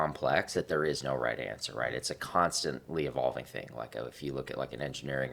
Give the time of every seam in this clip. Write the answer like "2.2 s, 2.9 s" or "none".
none